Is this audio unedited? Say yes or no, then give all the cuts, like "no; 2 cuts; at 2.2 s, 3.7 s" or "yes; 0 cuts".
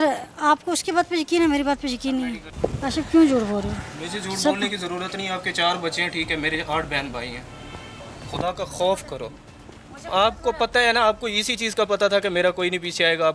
no; 1 cut; at 2.4 s